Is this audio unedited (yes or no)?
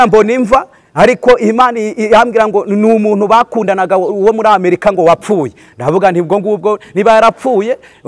yes